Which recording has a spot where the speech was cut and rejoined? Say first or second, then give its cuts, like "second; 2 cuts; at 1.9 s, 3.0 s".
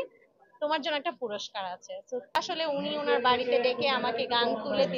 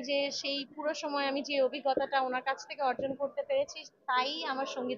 first; 1 cut; at 2.4 s